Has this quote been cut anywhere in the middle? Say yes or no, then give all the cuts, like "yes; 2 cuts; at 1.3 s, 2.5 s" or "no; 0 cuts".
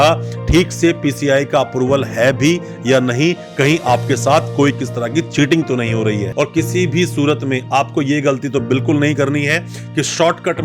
yes; 1 cut; at 6.3 s